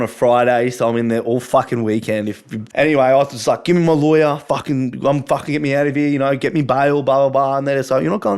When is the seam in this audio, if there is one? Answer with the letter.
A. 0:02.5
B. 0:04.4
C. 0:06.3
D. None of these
A